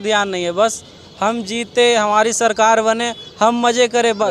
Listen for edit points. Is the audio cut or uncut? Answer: uncut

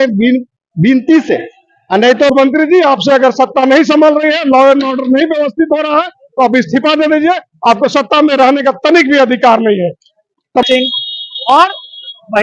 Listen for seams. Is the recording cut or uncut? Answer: cut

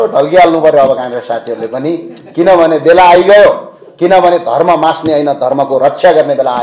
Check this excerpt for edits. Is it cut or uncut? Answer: uncut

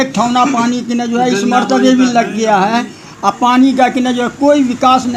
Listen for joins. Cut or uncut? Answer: uncut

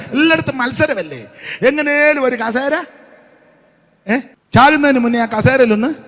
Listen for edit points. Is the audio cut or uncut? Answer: cut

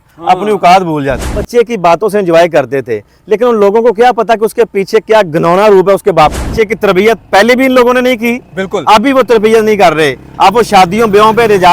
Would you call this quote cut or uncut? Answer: cut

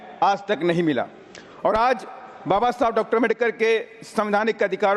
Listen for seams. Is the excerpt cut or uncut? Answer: uncut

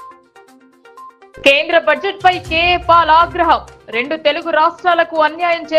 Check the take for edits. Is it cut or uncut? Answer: cut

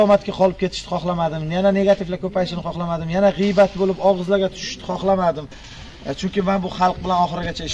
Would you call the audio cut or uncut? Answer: uncut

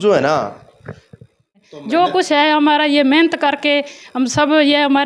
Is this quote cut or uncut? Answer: cut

